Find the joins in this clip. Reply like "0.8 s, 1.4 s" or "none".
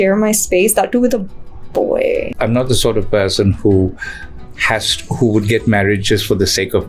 2.4 s